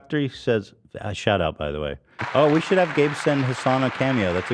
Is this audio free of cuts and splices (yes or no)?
no